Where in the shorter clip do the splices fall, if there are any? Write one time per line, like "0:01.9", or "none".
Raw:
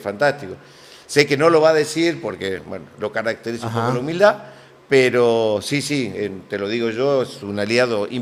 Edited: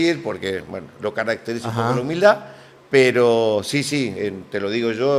none